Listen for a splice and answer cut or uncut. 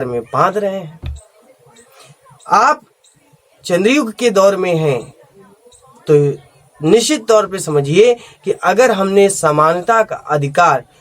uncut